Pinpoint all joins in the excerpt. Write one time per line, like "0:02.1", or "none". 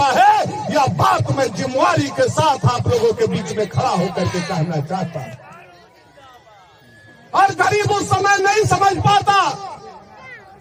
none

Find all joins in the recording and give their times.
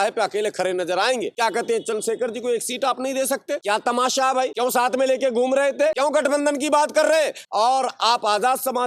0:01.3
0:03.6
0:04.5
0:06.0
0:07.4

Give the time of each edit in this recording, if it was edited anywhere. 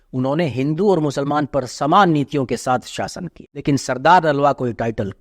0:03.5

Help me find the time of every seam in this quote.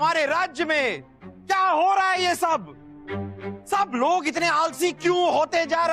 none

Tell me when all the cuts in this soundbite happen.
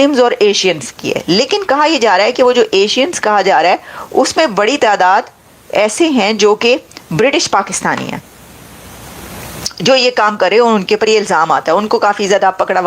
none

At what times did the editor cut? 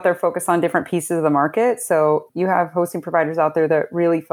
0:02.3

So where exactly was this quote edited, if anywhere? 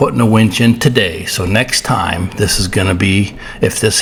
none

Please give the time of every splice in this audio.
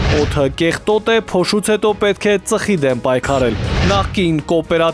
0:03.8

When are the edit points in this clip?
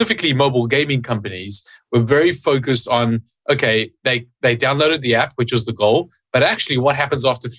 none

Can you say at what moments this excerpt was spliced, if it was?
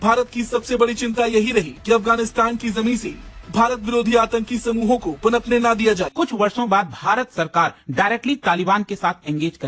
0:06.1

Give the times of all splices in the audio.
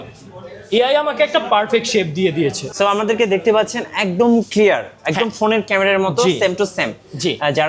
0:02.6

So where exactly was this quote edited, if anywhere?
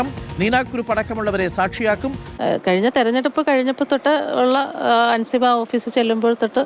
0:02.2

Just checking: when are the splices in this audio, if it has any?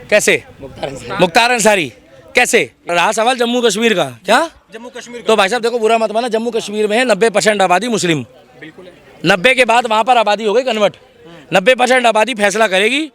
0:02.9

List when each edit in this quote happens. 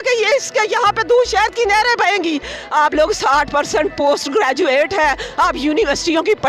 0:02.6

